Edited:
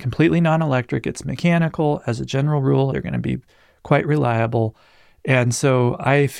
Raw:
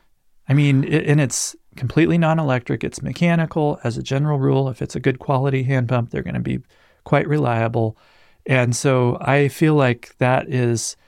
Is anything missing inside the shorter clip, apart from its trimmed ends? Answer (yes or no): yes